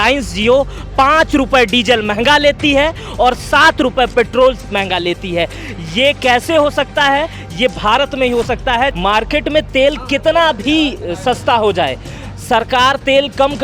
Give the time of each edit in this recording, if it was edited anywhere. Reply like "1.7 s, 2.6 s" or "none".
8.9 s